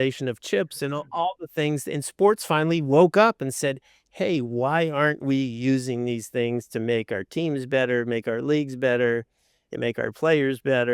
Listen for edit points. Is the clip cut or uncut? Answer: uncut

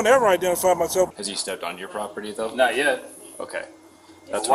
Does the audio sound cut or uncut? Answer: cut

